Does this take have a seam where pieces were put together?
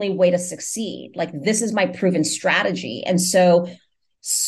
no; 0 cuts

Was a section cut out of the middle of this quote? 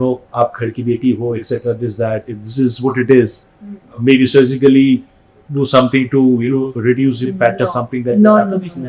no; 0 cuts

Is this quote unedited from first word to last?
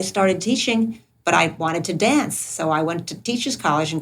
yes; 0 cuts

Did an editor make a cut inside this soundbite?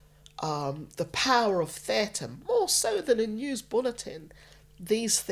no; 0 cuts

